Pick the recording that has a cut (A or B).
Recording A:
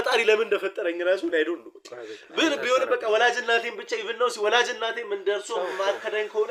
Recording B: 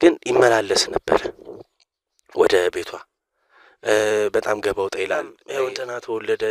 B